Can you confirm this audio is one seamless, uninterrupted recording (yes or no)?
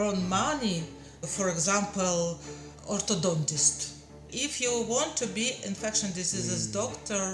no